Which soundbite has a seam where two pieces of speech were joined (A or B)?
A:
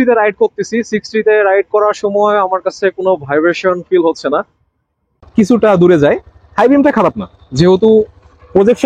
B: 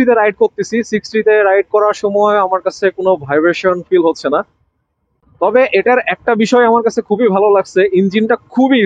A